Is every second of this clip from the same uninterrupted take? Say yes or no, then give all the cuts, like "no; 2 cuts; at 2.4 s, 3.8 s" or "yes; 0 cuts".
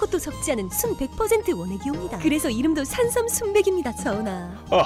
yes; 0 cuts